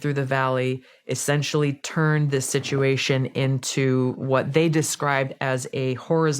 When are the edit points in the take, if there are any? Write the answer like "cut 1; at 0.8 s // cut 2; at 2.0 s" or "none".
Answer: none

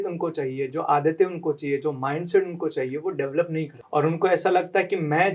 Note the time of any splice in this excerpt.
cut 1; at 3.8 s

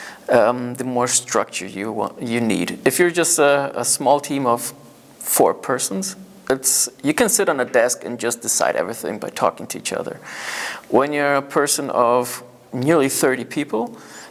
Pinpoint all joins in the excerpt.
none

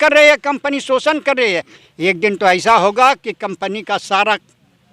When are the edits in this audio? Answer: cut 1; at 1.7 s

